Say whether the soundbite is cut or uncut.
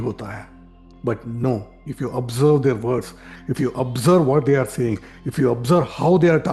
uncut